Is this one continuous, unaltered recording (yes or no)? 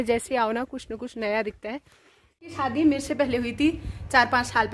no